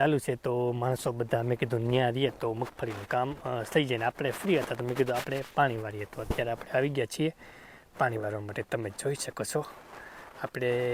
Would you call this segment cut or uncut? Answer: uncut